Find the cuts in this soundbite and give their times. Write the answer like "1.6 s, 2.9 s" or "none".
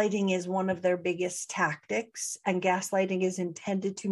none

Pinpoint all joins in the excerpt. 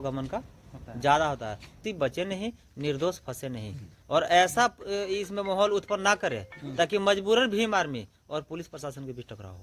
1.8 s

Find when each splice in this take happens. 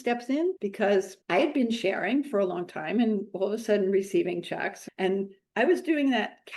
4.8 s

